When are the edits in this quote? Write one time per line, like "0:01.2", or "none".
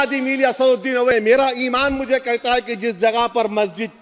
0:01.1